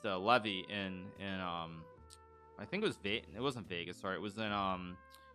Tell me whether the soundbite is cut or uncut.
uncut